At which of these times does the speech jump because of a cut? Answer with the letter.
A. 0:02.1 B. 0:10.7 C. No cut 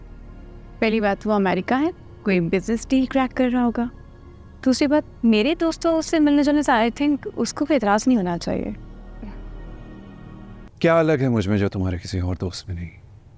B